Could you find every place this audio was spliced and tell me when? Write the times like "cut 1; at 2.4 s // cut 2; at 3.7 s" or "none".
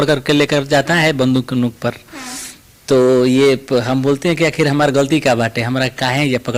none